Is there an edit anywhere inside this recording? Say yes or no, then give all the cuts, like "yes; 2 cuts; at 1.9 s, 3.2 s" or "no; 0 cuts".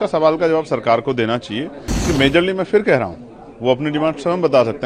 yes; 1 cut; at 1.9 s